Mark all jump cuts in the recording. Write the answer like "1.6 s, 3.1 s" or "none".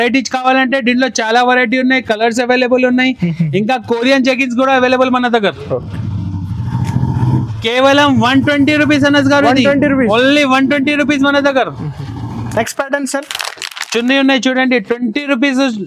none